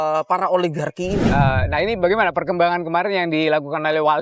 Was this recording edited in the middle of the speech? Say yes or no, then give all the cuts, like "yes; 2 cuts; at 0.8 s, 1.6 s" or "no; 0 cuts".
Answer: yes; 1 cut; at 1.3 s